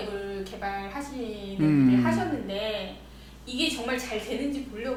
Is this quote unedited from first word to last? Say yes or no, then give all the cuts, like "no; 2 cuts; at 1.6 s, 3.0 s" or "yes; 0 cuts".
yes; 0 cuts